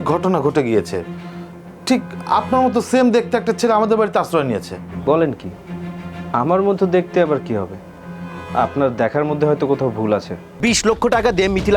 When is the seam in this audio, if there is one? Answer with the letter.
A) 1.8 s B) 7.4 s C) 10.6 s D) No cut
C